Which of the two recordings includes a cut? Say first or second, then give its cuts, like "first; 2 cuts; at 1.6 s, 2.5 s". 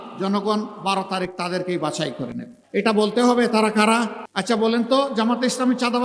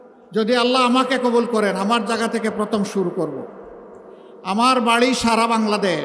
first; 2 cuts; at 2.5 s, 4.3 s